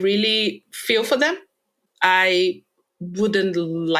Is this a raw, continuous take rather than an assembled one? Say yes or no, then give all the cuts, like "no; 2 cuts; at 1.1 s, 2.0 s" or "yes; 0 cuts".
no; 1 cut; at 1.5 s